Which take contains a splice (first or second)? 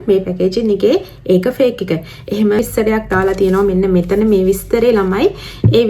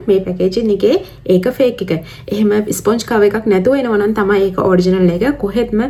first